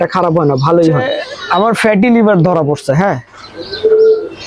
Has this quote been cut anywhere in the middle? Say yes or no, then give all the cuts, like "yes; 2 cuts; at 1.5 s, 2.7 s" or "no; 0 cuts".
yes; 1 cut; at 1.1 s